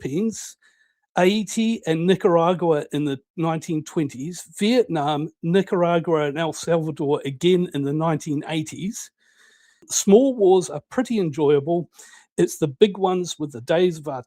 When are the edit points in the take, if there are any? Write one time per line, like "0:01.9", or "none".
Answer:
0:09.9